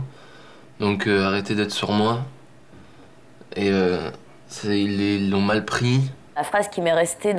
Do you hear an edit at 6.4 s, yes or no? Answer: yes